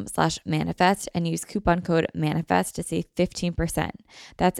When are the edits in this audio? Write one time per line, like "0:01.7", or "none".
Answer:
none